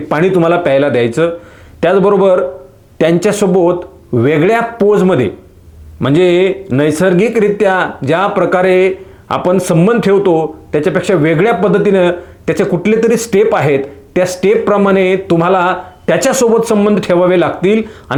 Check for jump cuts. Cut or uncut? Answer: uncut